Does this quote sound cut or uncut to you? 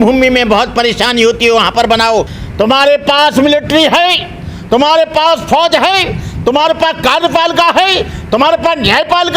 cut